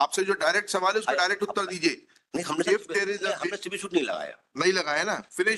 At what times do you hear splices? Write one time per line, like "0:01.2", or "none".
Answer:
none